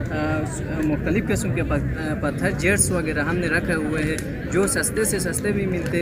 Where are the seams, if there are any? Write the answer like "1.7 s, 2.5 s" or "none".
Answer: none